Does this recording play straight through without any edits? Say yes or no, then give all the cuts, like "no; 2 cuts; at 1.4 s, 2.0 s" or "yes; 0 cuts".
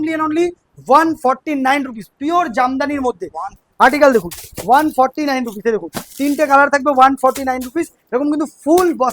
no; 1 cut; at 3.5 s